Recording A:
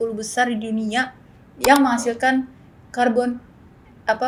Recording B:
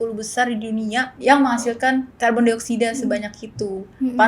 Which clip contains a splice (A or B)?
B